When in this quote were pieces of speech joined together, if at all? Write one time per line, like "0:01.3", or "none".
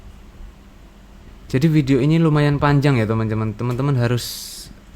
0:01.3